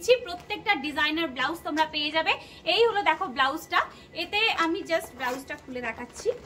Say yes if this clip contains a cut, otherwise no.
no